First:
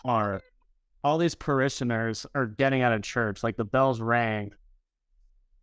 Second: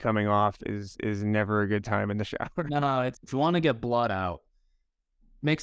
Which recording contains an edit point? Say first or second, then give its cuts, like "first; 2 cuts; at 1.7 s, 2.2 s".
second; 1 cut; at 3.2 s